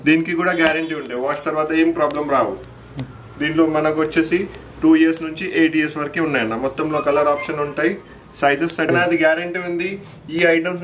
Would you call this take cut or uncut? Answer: cut